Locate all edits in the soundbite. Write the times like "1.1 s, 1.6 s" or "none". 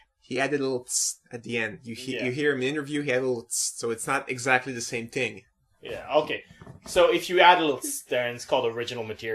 0.9 s